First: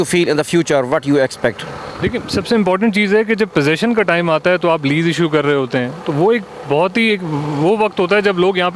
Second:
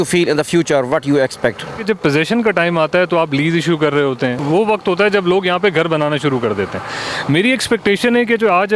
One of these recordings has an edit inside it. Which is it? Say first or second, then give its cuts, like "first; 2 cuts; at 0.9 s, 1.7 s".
second; 2 cuts; at 1.8 s, 4.4 s